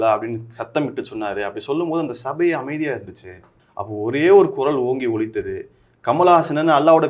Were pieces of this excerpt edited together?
no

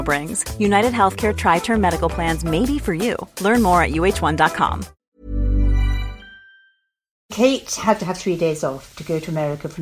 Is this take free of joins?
no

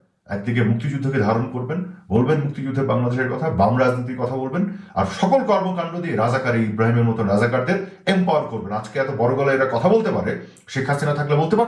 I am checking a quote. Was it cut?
no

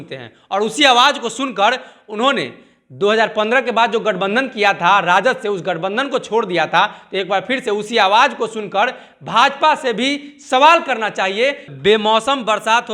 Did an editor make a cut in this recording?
yes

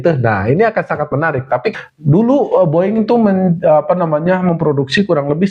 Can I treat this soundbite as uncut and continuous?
no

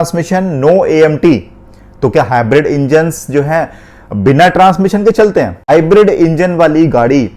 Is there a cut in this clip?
yes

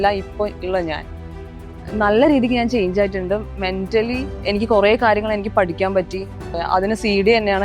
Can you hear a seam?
yes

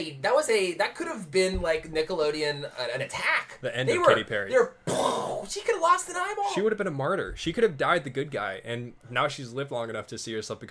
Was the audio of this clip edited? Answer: no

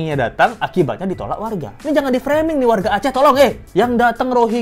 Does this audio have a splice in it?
yes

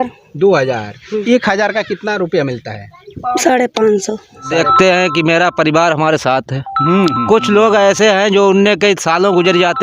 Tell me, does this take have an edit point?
yes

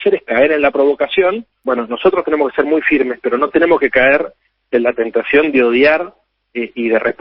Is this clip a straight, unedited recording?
no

